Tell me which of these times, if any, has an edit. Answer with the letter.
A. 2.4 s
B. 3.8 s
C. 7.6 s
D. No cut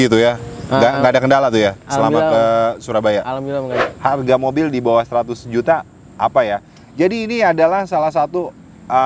B